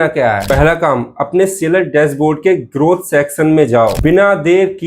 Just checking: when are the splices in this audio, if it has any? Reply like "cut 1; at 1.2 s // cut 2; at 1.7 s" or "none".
cut 1; at 3.9 s